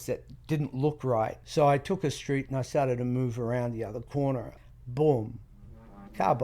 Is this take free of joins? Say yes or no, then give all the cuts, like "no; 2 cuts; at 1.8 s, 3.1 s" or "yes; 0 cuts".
no; 2 cuts; at 1.4 s, 4.5 s